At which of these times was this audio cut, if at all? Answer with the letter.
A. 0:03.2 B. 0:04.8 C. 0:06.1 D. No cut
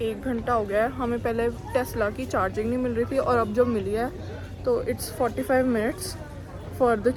D